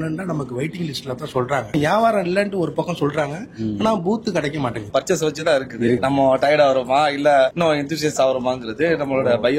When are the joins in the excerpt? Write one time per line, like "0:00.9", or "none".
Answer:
0:01.7
0:04.8
0:06.0